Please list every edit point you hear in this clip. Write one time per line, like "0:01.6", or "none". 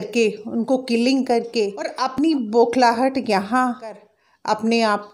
0:02.1
0:03.9